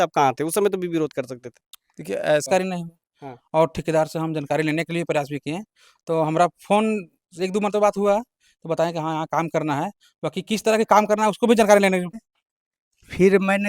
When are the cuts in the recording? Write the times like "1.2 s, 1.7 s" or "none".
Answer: 2.5 s, 12.1 s